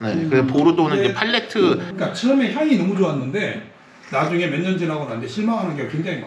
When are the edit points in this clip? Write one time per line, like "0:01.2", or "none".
0:01.9